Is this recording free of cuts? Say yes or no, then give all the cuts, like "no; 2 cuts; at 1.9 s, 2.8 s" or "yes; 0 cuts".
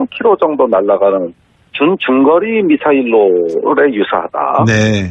no; 1 cut; at 2.0 s